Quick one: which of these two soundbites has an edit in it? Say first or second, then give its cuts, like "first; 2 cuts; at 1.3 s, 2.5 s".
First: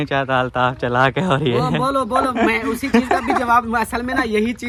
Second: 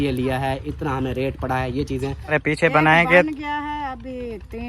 second; 1 cut; at 2.3 s